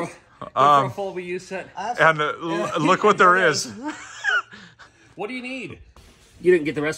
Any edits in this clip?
yes; 1 cut; at 5.8 s

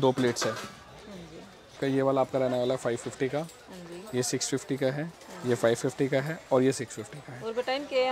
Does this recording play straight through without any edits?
no; 1 cut; at 1.8 s

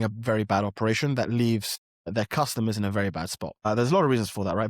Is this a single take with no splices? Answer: no; 1 cut; at 3.7 s

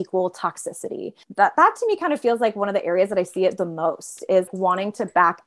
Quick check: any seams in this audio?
yes; 2 cuts; at 1.2 s, 4.5 s

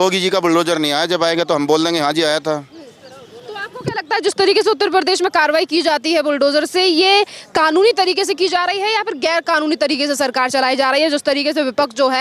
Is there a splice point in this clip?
no; 0 cuts

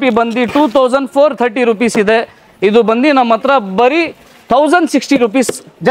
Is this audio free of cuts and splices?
yes; 0 cuts

